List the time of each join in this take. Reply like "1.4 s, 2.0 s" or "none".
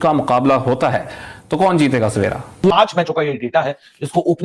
2.7 s

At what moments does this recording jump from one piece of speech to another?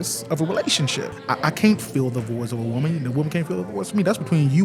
1.2 s

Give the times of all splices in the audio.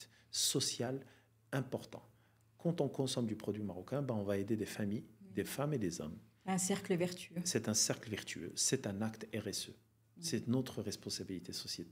none

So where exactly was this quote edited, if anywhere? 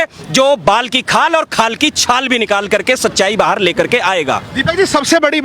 none

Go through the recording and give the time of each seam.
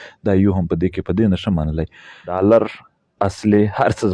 2.3 s

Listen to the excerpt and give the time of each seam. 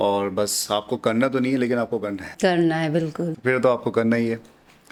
none

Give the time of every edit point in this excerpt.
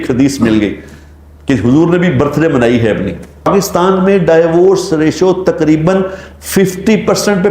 3.5 s

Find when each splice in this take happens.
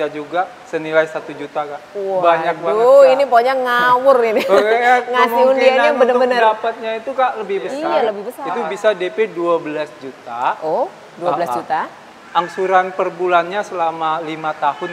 8.3 s

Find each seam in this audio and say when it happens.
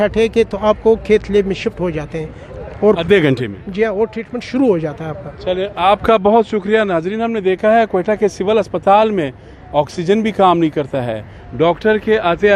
none

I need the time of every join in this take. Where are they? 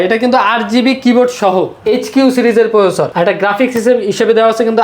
1.8 s, 3.1 s

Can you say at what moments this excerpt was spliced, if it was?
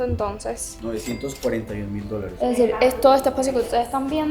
2.3 s

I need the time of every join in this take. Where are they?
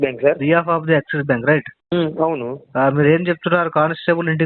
1.8 s

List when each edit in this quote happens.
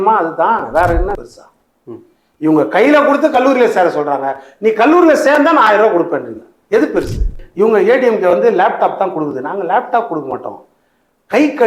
1.2 s, 7.4 s

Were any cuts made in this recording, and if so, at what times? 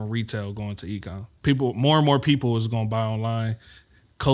1.3 s

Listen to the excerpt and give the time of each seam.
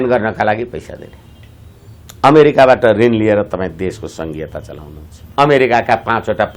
5.2 s

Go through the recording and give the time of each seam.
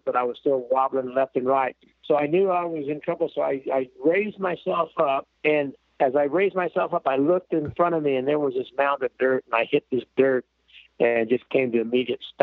none

